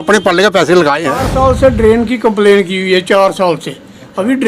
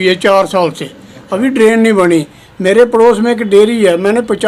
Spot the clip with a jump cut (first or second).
first